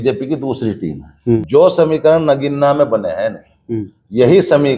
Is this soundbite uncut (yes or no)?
no